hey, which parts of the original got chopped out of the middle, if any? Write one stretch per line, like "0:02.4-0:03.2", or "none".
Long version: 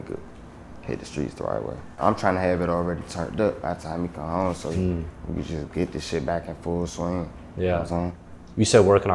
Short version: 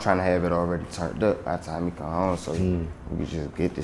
none